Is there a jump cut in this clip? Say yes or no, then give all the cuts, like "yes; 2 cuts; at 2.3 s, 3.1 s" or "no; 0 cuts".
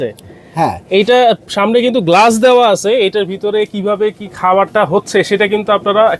no; 0 cuts